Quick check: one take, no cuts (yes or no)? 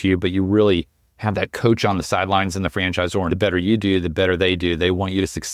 no